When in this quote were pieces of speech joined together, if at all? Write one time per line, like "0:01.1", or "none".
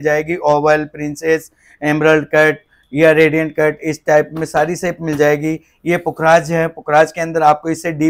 none

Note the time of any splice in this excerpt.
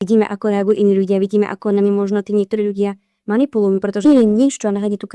0:04.1

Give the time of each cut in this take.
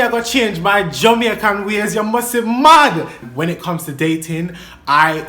0:03.2

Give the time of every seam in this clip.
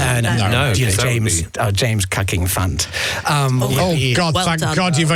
none

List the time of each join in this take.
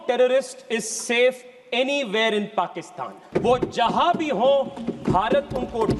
0:03.2

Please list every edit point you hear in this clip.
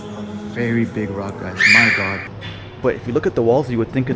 0:02.2

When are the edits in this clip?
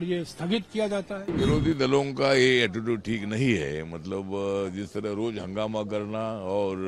0:01.2

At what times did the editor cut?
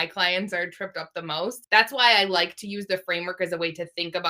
0:01.6

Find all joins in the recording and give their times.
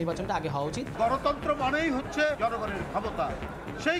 0:00.9
0:02.4

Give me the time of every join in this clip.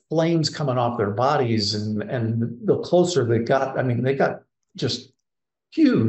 none

